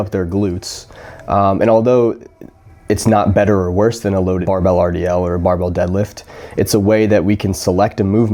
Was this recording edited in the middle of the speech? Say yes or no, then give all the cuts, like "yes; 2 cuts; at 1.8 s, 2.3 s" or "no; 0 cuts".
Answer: no; 0 cuts